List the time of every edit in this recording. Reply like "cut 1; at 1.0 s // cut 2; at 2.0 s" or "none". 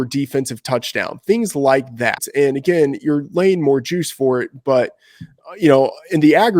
cut 1; at 2.2 s